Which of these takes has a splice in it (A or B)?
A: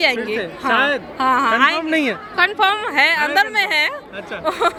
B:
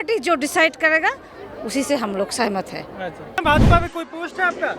B